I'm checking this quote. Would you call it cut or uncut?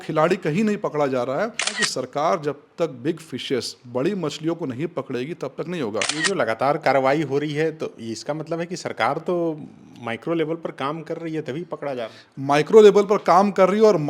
cut